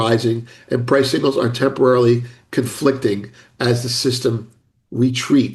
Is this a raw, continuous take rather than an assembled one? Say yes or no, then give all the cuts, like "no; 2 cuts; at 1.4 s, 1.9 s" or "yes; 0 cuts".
yes; 0 cuts